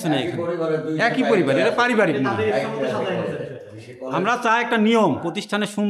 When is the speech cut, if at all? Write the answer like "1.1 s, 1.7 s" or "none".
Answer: none